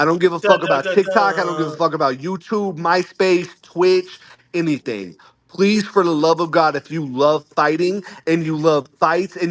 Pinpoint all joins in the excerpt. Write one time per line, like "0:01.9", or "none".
none